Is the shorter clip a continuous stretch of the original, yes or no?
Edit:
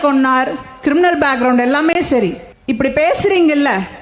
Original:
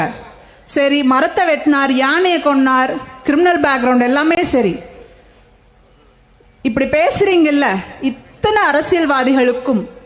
no